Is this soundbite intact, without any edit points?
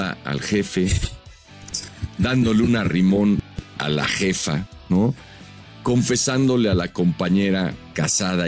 yes; 0 cuts

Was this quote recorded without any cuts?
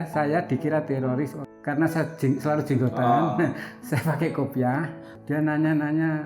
no; 2 cuts; at 1.4 s, 5.1 s

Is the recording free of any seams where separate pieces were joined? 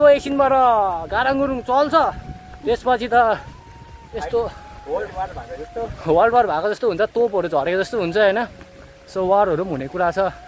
yes; 0 cuts

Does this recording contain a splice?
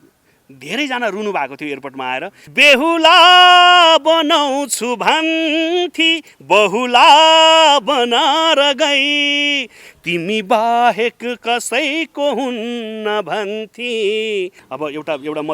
yes; 2 cuts; at 2.4 s, 14.6 s

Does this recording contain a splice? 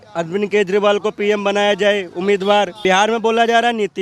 yes; 1 cut; at 2.8 s

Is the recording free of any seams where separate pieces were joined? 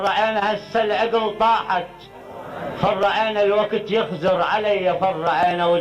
yes; 0 cuts

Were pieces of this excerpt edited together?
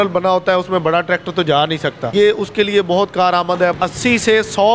yes; 2 cuts; at 2.1 s, 3.7 s

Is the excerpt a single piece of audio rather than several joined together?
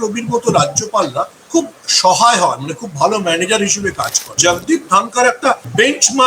no; 1 cut; at 4.4 s

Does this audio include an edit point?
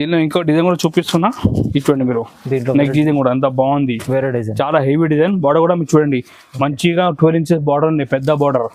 no; 0 cuts

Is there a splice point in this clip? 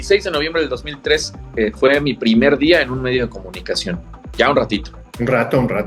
no; 0 cuts

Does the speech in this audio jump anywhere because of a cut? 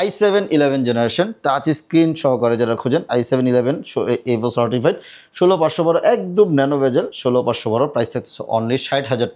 no; 0 cuts

